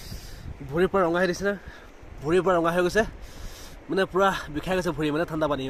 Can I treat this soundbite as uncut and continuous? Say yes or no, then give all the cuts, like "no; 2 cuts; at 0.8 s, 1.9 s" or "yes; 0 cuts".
yes; 0 cuts